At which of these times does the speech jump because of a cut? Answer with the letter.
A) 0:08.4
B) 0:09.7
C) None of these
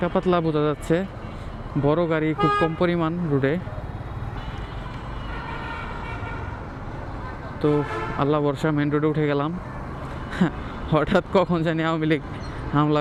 C